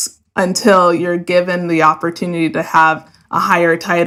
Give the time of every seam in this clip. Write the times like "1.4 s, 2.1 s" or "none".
none